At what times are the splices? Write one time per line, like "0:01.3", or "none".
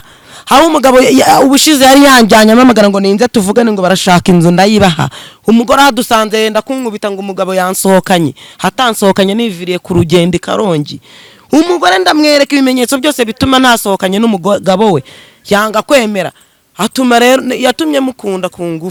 none